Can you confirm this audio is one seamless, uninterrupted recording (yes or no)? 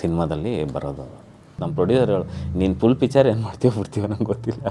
no